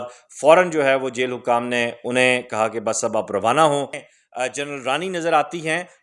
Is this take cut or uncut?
cut